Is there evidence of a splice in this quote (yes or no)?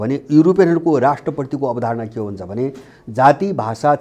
no